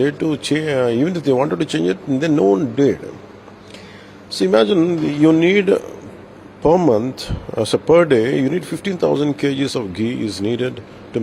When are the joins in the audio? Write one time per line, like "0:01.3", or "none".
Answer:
none